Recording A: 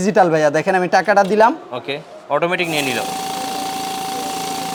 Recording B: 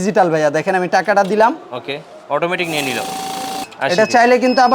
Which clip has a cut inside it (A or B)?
B